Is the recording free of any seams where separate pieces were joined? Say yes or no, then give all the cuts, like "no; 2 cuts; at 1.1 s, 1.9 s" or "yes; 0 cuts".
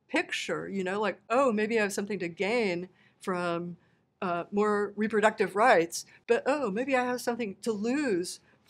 yes; 0 cuts